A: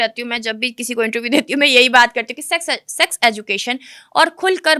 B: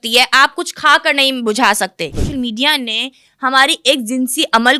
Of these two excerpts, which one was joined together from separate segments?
B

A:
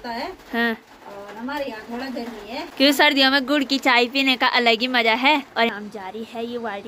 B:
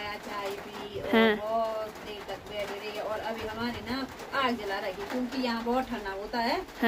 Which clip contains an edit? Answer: A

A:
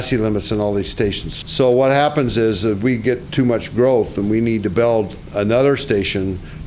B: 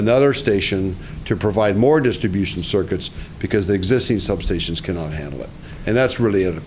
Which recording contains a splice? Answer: A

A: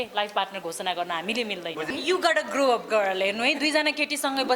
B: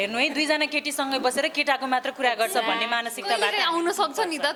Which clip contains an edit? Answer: A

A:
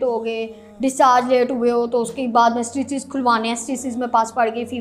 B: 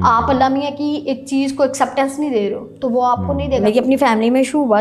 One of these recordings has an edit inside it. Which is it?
B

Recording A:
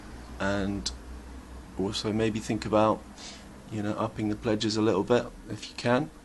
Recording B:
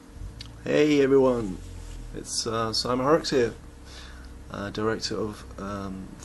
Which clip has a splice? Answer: A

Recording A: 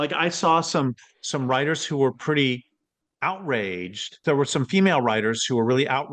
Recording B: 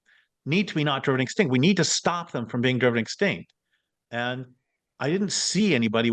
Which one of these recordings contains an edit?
A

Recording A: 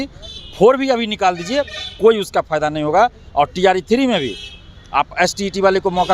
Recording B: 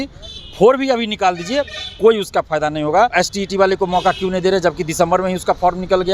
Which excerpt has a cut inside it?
B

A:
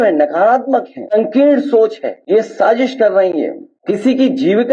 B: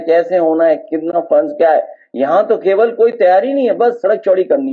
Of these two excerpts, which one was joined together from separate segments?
A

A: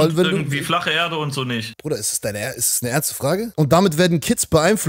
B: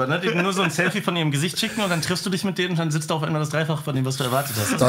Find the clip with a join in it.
A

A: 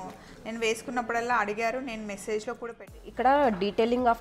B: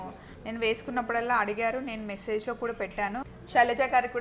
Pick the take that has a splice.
A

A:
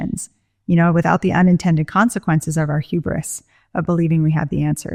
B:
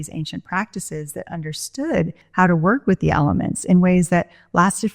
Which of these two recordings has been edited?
B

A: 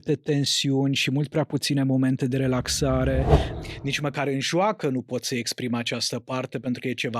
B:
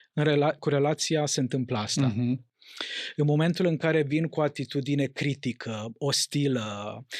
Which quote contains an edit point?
A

